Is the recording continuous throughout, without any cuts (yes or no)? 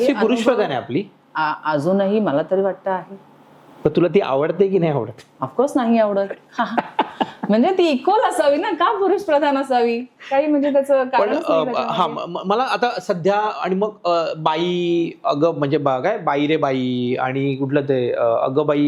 yes